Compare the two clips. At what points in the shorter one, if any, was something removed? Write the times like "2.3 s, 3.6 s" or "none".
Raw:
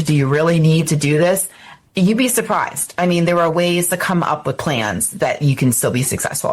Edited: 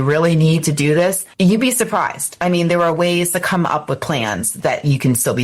1.2 s

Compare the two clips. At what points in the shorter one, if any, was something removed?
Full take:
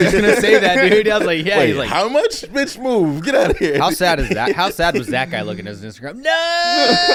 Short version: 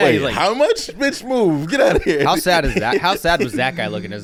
none

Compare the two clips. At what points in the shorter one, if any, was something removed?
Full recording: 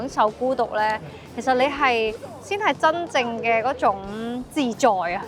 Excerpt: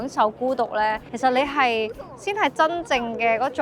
1.1 s

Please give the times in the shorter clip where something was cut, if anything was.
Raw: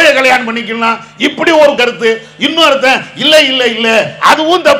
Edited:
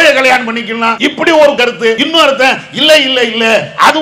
0.9 s, 2.0 s

